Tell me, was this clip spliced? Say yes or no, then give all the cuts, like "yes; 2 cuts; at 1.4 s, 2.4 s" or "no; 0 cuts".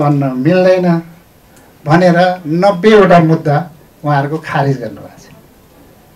no; 0 cuts